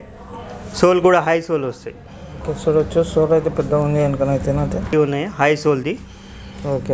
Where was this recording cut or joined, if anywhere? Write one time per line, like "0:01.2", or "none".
none